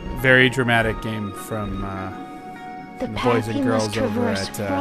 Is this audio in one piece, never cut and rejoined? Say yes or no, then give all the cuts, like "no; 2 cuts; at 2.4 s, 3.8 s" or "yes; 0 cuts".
no; 1 cut; at 1.1 s